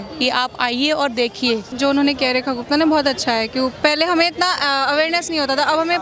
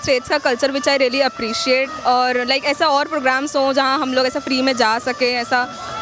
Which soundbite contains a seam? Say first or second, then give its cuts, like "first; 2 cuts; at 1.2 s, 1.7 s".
first; 1 cut; at 1.7 s